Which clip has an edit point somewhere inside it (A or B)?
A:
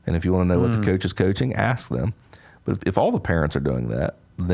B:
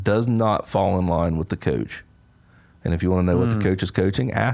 A